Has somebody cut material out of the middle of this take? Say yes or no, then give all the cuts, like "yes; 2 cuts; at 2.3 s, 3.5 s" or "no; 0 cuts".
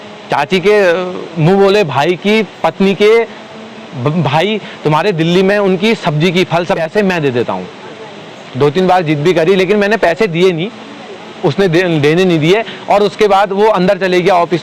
yes; 1 cut; at 6.8 s